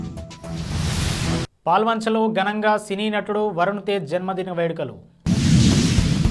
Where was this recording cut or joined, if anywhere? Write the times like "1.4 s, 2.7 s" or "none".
1.5 s